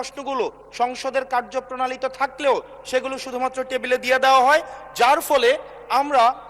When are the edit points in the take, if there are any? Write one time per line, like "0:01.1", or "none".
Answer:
none